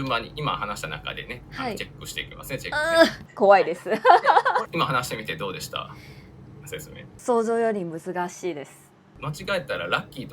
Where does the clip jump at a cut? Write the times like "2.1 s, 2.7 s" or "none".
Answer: 4.7 s, 9.2 s